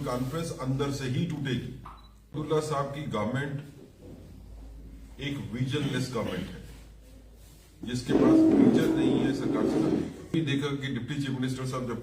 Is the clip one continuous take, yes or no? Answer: no